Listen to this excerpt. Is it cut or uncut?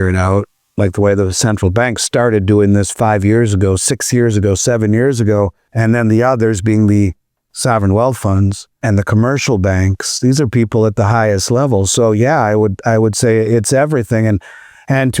cut